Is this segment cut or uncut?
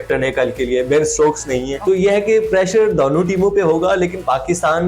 cut